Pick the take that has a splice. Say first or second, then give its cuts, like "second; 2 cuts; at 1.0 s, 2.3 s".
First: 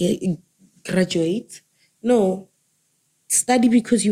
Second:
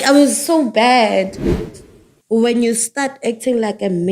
second; 1 cut; at 1.7 s